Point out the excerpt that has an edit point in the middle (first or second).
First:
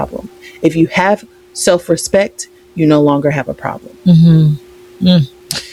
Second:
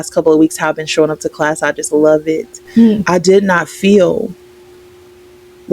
second